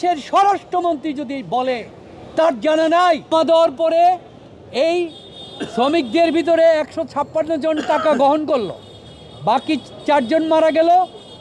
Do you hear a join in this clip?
yes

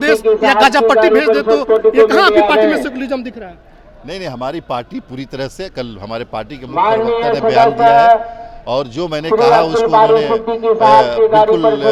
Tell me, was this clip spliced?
no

